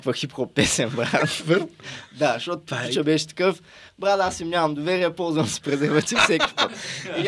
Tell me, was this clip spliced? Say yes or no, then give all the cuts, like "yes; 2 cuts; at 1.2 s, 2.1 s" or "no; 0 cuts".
no; 0 cuts